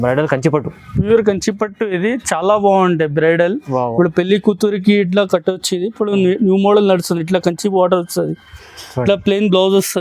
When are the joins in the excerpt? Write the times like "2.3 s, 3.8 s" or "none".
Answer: none